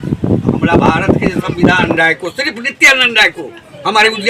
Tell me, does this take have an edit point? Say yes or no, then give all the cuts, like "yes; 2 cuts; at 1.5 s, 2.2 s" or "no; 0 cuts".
yes; 1 cut; at 1.9 s